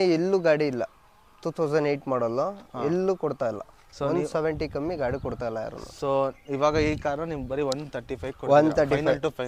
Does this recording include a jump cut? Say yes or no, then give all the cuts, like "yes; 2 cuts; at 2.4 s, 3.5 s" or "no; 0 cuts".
no; 0 cuts